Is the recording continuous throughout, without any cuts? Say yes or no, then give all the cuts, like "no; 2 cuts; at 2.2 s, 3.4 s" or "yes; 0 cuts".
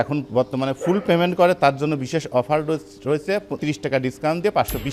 no; 1 cut; at 3.6 s